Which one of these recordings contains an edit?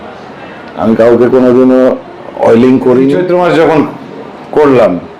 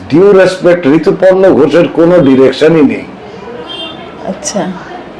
first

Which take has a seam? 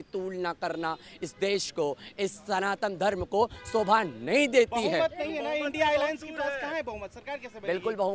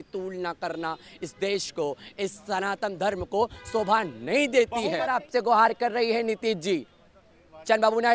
second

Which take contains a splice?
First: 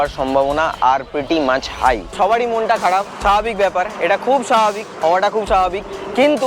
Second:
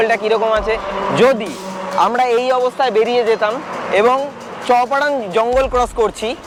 first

